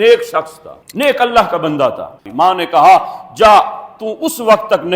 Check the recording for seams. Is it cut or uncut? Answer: cut